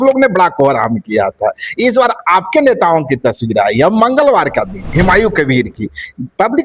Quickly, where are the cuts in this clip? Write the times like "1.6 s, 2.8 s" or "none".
4.9 s